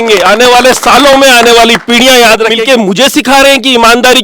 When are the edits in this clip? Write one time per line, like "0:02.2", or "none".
0:02.6